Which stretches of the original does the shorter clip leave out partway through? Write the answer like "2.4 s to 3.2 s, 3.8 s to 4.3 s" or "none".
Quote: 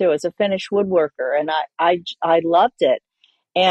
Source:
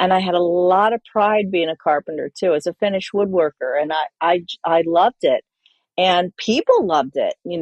none